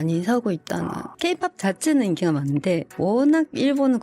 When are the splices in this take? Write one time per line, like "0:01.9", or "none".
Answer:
0:01.1